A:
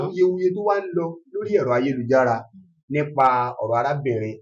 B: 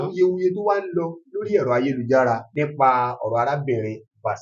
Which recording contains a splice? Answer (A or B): B